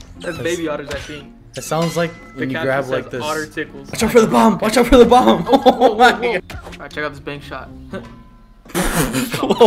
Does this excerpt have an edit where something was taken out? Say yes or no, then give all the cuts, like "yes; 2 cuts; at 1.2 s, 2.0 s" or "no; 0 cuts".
yes; 2 cuts; at 3.8 s, 6.4 s